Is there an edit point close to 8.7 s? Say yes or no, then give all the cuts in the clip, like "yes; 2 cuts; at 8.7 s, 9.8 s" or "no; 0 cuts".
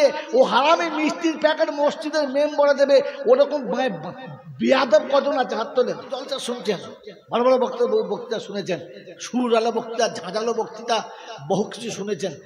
no; 1 cut; at 6.2 s